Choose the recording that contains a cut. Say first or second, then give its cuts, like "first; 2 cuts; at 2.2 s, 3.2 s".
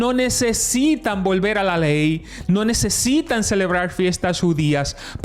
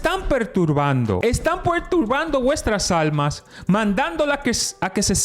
second; 1 cut; at 1.2 s